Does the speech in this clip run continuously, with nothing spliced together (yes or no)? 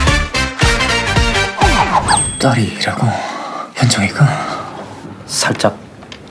no